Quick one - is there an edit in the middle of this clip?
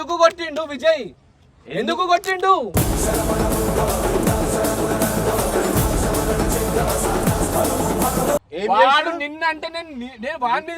yes; 1 cut; at 8.5 s

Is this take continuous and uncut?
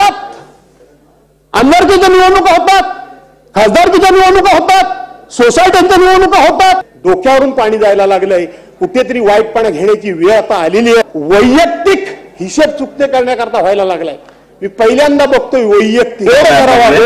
no; 3 cuts; at 6.9 s, 11.0 s, 16.3 s

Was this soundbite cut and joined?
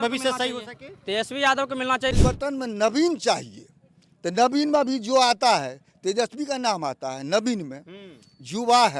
yes; 1 cut; at 2.2 s

